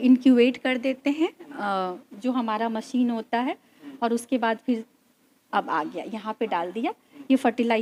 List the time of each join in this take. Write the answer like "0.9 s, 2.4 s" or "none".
none